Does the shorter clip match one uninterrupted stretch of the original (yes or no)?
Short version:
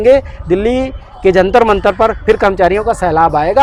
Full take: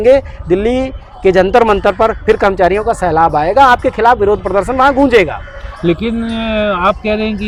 yes